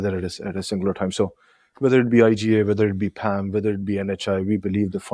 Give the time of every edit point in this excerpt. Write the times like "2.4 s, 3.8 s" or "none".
none